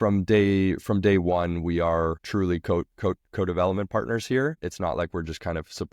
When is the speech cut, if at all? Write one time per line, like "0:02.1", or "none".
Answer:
0:02.2
0:04.6